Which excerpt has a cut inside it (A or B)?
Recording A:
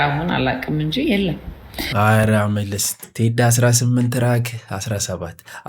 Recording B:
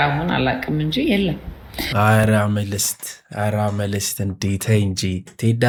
A